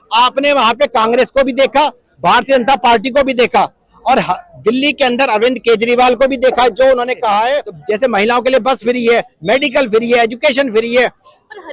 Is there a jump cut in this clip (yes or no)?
yes